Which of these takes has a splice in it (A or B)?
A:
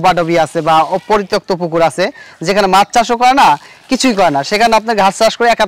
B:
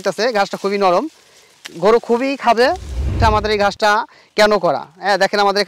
B